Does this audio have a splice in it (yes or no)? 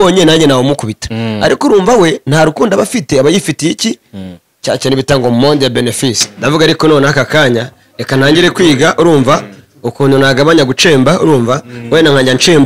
yes